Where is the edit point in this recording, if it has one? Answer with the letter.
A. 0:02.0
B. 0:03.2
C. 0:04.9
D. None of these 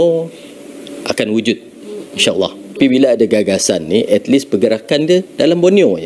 D